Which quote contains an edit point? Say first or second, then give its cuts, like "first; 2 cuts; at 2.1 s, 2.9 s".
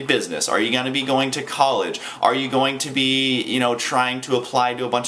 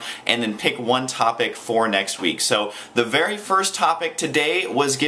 second; 1 cut; at 1.4 s